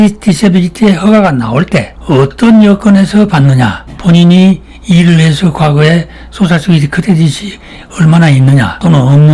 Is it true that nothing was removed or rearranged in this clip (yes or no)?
yes